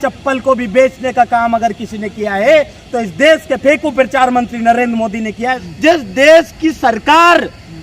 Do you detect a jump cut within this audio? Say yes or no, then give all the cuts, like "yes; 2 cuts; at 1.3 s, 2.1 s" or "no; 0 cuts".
yes; 1 cut; at 5.7 s